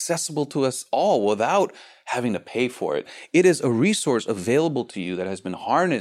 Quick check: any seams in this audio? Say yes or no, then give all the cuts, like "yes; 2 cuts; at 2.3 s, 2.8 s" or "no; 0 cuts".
yes; 1 cut; at 3.1 s